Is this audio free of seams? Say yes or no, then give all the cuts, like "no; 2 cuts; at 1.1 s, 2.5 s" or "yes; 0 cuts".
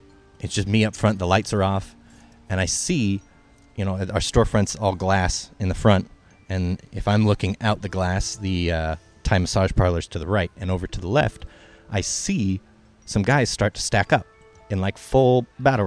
yes; 0 cuts